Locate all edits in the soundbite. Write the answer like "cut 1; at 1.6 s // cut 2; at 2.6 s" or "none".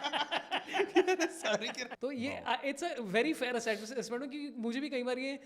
cut 1; at 1.8 s